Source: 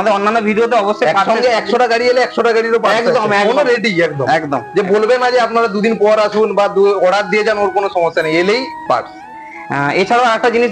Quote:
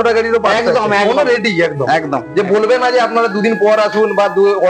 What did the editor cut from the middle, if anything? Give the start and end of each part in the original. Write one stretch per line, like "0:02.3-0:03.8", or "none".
none